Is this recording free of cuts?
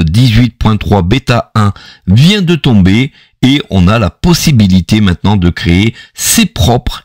no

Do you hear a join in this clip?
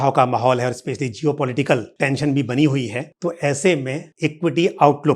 yes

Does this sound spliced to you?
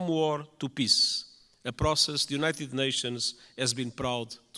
no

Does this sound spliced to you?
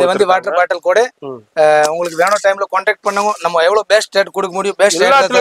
no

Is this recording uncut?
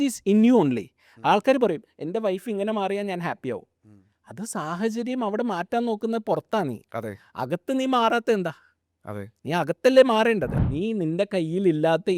no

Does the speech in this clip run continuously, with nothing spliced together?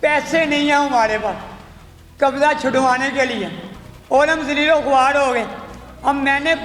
yes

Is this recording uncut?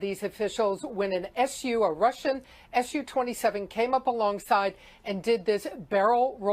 no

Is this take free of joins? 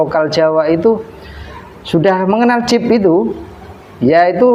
yes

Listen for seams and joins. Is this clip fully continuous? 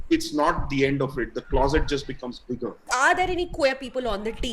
no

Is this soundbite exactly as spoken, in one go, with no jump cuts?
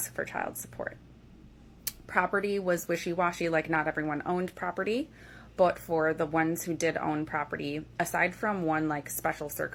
yes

